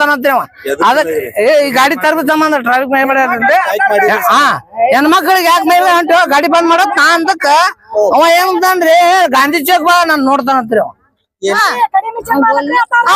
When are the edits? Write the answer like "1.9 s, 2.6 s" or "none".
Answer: 11.6 s